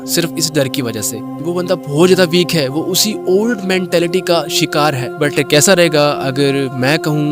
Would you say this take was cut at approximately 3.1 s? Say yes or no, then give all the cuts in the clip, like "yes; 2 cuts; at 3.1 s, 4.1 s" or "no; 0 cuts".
no; 2 cuts; at 1.4 s, 5.1 s